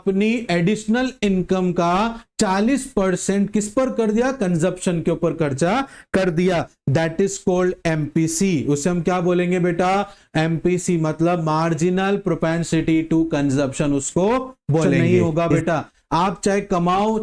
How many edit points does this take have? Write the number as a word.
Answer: one